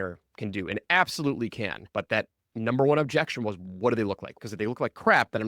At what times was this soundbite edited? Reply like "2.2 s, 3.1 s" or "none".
1.8 s, 4.3 s